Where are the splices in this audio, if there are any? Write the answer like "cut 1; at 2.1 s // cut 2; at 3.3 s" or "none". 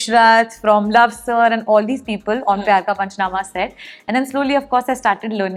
none